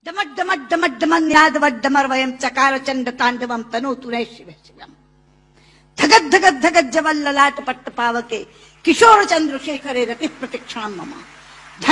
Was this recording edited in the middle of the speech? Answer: yes; 1 cut; at 1.3 s

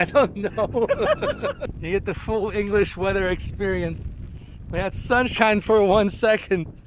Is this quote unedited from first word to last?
no; 1 cut; at 1.7 s

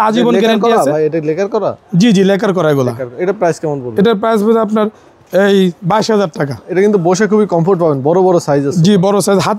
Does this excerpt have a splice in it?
no; 0 cuts

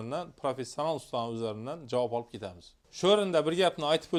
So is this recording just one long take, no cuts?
yes; 0 cuts

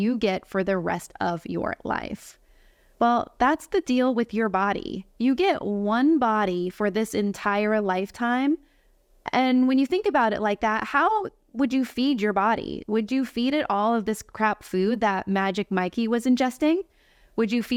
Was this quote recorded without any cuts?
yes; 0 cuts

